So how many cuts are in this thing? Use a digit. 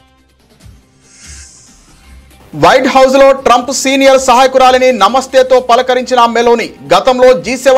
1